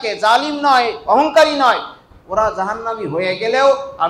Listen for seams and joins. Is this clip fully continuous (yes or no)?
yes